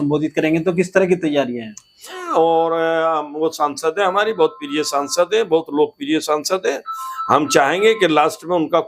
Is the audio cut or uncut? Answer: cut